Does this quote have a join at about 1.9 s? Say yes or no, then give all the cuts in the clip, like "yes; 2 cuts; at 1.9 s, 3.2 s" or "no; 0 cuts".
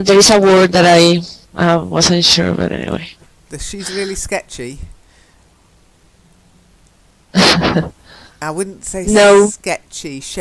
yes; 1 cut; at 1.9 s